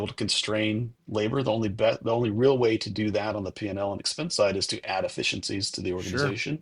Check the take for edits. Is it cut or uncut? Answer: uncut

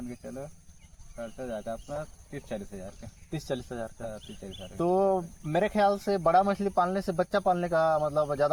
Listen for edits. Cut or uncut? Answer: uncut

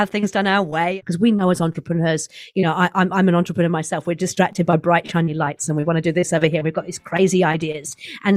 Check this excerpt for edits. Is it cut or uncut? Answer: cut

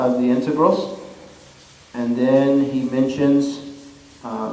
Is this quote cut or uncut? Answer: cut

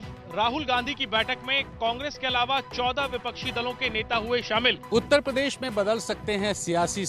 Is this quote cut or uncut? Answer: cut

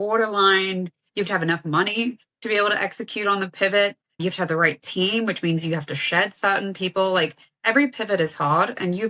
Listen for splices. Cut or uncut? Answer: uncut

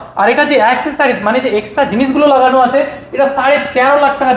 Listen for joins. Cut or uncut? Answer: uncut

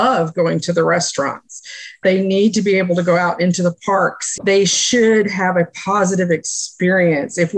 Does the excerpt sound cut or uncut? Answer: uncut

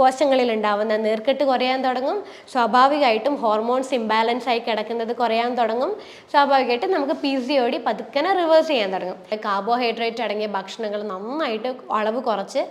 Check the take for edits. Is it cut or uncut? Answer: cut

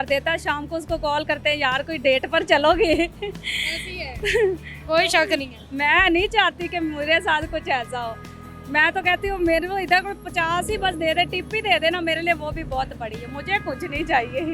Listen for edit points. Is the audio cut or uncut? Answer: uncut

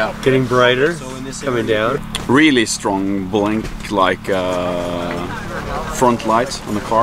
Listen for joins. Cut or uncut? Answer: cut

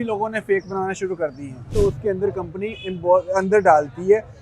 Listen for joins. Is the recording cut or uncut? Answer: cut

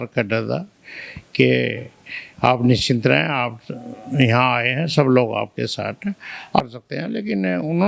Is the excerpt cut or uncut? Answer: cut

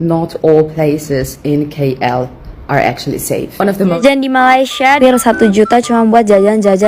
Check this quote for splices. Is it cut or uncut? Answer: cut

